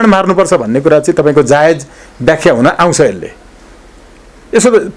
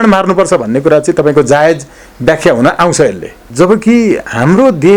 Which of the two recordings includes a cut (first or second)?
second